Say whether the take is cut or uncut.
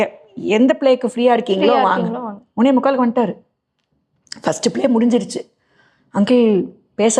uncut